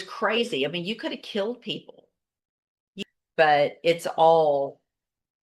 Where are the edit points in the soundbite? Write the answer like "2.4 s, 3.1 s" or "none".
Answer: 2.9 s

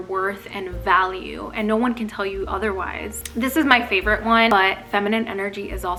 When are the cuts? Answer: none

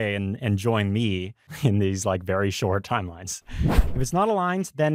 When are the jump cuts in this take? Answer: 1.5 s, 3.8 s

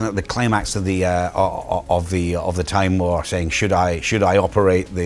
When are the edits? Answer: none

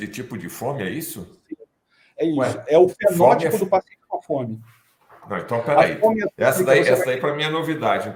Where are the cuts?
none

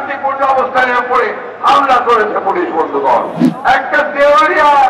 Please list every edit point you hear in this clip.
3.4 s

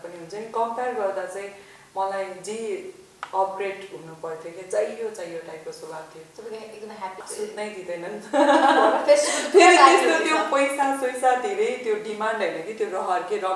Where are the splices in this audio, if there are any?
7.2 s

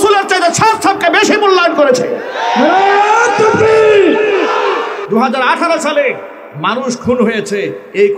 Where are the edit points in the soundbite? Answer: 5.0 s

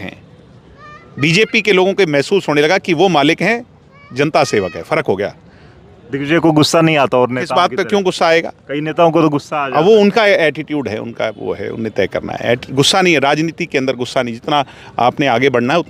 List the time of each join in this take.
none

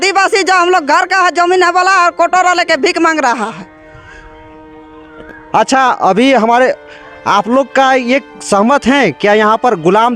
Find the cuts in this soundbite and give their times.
none

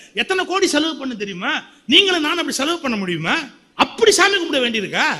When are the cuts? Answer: 3.6 s

